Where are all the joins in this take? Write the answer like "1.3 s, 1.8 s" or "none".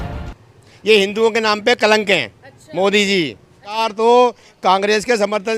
3.8 s